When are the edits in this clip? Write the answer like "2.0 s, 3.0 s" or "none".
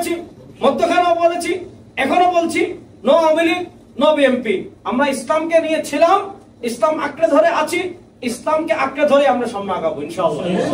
none